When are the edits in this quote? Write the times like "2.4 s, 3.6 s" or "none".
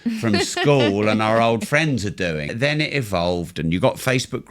2.5 s